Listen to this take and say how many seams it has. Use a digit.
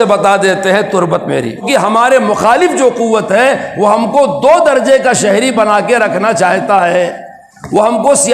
1